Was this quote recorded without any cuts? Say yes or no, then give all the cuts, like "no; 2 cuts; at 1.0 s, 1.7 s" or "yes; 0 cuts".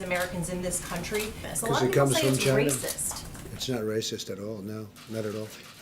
no; 1 cut; at 1.5 s